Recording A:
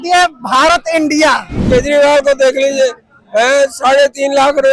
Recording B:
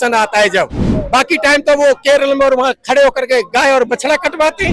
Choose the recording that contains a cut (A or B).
A